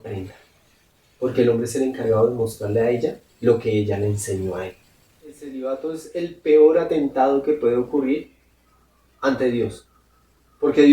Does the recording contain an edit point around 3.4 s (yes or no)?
no